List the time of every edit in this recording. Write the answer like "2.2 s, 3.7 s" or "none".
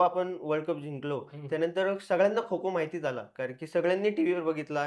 none